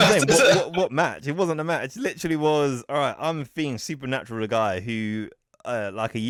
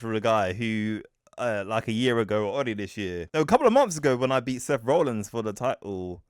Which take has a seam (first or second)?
second